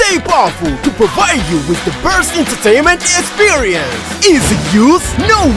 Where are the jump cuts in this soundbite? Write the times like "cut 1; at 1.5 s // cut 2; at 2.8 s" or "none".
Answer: none